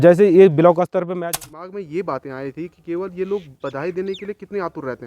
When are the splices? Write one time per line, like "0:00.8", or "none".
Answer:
0:01.0